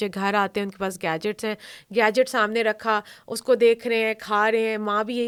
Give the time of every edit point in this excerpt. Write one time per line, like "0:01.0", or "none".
none